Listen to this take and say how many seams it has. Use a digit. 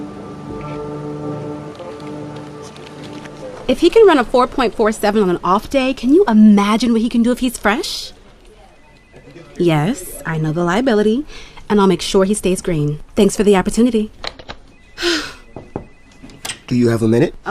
1